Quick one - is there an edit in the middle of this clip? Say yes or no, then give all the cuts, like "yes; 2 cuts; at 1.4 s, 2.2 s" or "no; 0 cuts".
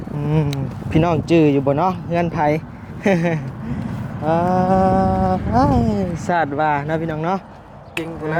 no; 0 cuts